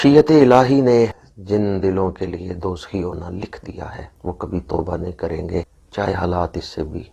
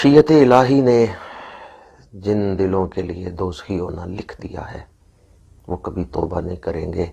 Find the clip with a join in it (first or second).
first